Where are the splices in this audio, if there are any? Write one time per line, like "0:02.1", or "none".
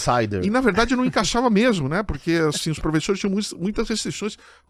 none